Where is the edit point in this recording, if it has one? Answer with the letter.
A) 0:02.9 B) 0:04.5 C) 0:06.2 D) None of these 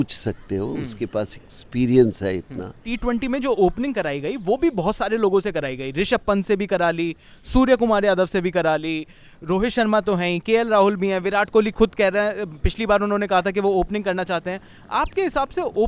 A